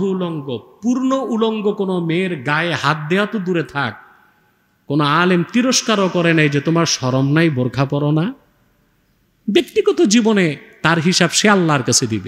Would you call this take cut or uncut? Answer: uncut